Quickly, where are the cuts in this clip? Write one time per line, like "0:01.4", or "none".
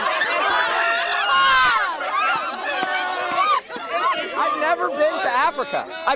none